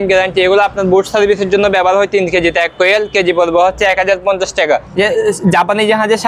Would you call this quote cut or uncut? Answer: cut